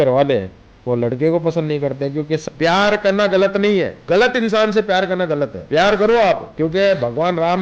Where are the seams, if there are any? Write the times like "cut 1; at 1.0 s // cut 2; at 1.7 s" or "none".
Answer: cut 1; at 2.4 s // cut 2; at 4.0 s // cut 3; at 5.6 s // cut 4; at 6.5 s